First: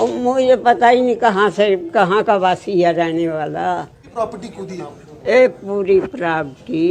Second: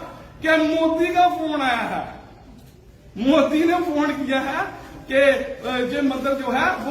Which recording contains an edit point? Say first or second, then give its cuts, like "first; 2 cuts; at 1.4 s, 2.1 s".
first; 1 cut; at 4.1 s